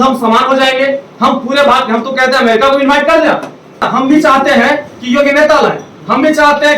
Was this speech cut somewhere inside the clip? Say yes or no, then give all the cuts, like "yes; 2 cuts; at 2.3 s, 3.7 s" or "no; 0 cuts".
yes; 1 cut; at 3.9 s